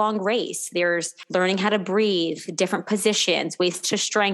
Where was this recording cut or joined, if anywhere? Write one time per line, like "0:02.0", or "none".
0:01.1